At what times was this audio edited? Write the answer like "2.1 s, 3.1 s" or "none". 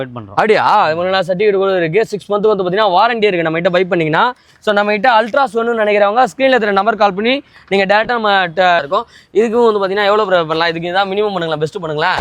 8.9 s